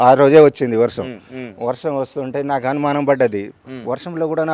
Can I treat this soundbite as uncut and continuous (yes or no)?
yes